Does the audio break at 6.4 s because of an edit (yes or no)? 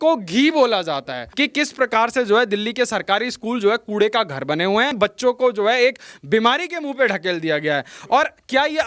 no